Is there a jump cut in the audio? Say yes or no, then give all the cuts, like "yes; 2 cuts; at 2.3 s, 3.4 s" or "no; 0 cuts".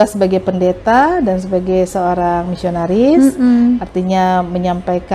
no; 0 cuts